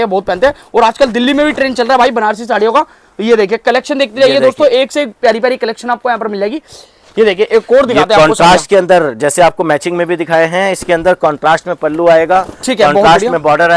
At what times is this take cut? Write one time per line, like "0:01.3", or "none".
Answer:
none